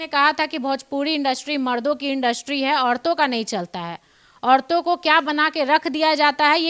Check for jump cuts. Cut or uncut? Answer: uncut